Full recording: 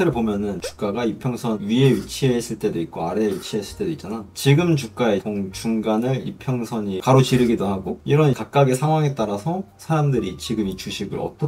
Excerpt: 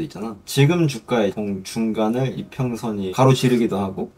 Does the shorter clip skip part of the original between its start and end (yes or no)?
no